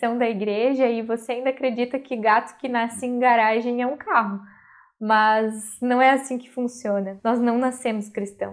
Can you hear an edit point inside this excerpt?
yes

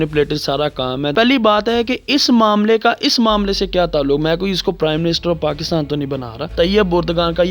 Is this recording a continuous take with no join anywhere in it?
no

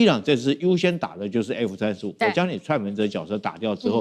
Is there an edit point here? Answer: no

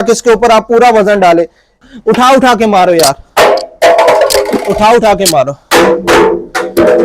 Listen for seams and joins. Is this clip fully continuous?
no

